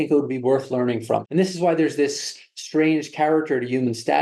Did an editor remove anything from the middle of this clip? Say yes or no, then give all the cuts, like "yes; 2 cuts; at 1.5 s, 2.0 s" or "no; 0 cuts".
yes; 1 cut; at 1.2 s